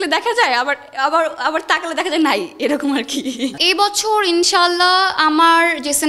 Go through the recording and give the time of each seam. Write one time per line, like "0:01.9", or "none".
0:03.5